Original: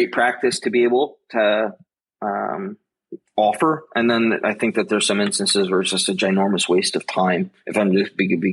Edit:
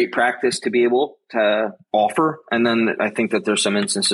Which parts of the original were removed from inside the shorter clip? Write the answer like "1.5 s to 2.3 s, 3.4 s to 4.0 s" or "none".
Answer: 1.8 s to 3.2 s